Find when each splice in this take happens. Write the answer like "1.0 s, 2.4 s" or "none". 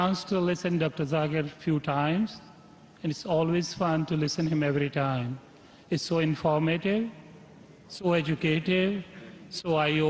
none